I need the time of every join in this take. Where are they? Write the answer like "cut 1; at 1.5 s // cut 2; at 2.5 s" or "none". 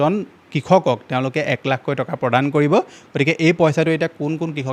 none